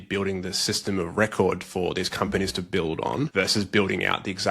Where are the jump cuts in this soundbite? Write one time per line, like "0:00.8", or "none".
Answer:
0:03.3